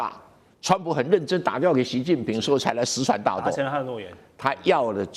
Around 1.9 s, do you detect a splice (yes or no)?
no